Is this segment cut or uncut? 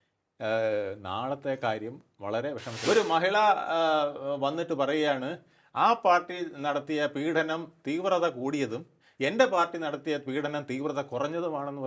cut